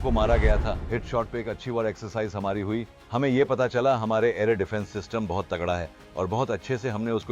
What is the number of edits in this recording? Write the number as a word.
zero